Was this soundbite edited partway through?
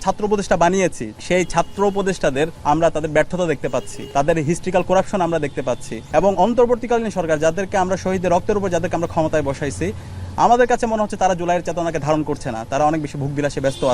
yes; 4 cuts; at 1.1 s, 2.6 s, 4.0 s, 5.9 s

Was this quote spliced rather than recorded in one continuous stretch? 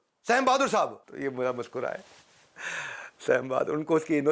yes; 1 cut; at 1.0 s

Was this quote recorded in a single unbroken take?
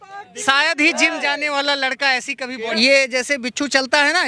no; 1 cut; at 2.6 s

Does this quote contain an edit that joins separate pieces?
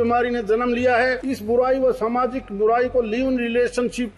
yes; 1 cut; at 1.3 s

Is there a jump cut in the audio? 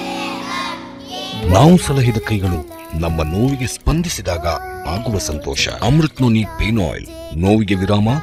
no; 0 cuts

